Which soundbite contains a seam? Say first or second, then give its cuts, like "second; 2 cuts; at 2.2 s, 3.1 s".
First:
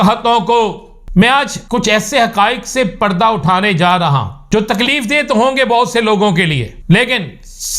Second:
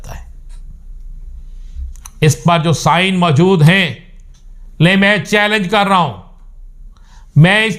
first; 4 cuts; at 0.9 s, 1.6 s, 4.3 s, 6.7 s